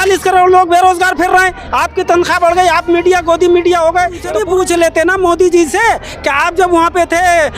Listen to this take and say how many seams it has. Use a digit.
1